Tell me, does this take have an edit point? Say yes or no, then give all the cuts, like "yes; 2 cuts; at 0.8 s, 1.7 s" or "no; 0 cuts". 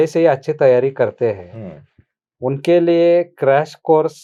no; 0 cuts